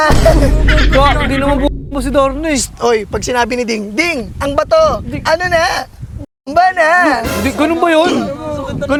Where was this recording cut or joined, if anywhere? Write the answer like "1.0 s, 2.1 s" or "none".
none